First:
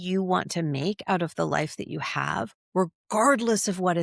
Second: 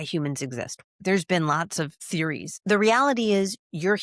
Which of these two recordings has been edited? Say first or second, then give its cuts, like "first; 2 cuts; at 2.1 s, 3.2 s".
second; 2 cuts; at 1.0 s, 2.0 s